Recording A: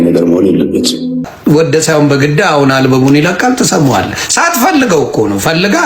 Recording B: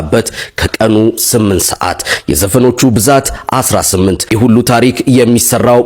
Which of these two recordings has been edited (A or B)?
A